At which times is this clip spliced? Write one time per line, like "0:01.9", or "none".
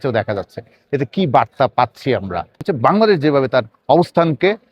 0:02.7